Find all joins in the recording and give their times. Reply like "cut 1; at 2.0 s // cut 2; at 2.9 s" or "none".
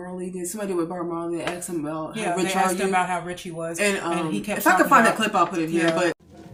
none

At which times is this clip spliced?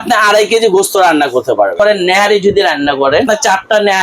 cut 1; at 1.8 s // cut 2; at 3.3 s

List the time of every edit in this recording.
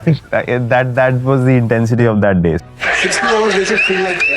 cut 1; at 2.6 s

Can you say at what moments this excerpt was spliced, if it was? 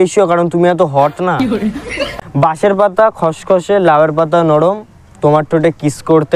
cut 1; at 2.1 s

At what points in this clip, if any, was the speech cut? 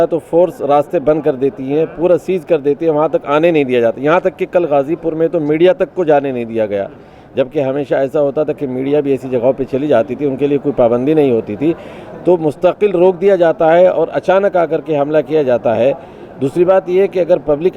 none

